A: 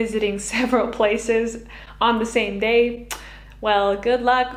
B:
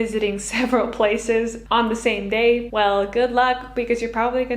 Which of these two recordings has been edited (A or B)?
B